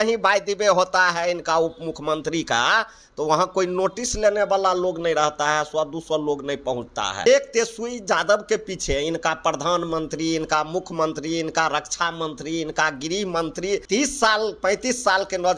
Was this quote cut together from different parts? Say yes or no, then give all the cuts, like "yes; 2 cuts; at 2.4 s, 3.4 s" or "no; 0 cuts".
yes; 2 cuts; at 7.3 s, 13.8 s